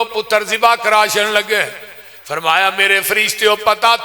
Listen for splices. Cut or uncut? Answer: uncut